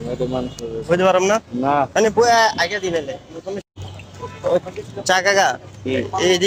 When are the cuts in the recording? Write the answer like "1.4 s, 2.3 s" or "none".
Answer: none